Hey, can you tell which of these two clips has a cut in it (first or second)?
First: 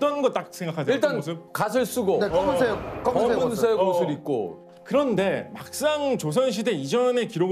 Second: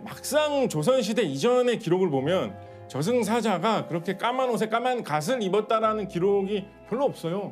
first